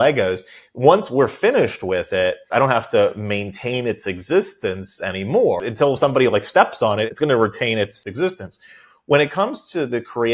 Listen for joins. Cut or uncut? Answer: cut